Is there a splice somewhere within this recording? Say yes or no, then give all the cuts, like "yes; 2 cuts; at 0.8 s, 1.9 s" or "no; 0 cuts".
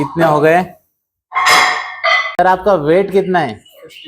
yes; 1 cut; at 2.2 s